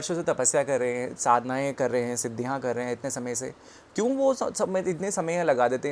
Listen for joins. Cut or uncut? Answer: uncut